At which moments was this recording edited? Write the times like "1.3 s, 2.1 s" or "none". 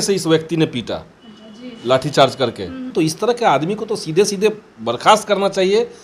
2.9 s